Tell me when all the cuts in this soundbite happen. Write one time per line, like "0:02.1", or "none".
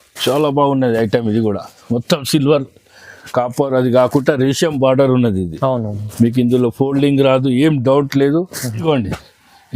0:08.8